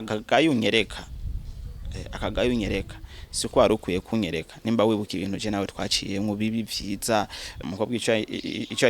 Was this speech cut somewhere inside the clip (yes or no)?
yes